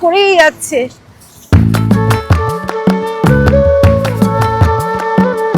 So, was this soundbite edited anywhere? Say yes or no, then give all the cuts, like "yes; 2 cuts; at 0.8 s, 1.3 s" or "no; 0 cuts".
no; 0 cuts